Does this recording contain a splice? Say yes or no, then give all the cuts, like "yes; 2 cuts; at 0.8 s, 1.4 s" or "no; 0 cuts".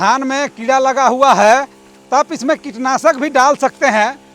no; 0 cuts